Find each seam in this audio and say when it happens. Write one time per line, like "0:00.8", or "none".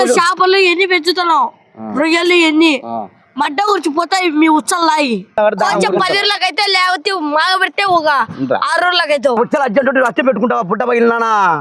0:05.4
0:09.4